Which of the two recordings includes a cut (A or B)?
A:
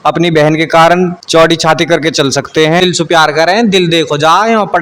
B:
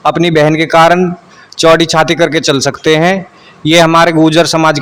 A